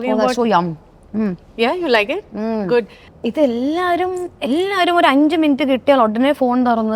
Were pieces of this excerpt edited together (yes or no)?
yes